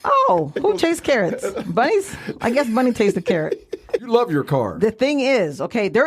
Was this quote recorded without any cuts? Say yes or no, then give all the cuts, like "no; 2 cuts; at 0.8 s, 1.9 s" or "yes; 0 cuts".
no; 1 cut; at 4.0 s